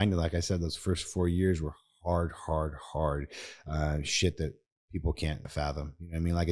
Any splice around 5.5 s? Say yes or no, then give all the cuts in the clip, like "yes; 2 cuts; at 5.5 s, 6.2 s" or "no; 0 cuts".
yes; 1 cut; at 5.5 s